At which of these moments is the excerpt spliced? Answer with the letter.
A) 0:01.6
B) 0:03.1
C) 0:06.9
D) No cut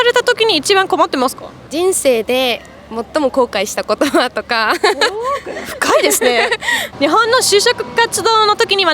C